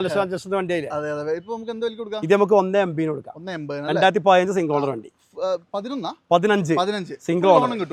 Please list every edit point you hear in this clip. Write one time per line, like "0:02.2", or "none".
none